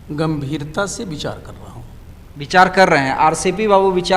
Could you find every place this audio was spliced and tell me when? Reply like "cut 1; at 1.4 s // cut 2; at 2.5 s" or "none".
none